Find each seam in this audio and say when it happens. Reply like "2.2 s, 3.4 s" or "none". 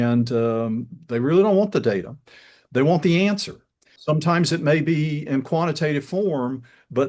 3.9 s